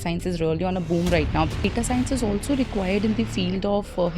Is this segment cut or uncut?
cut